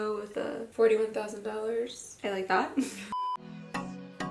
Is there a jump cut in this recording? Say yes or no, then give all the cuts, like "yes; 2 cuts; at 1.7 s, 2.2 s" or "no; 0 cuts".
yes; 2 cuts; at 2.1 s, 3.2 s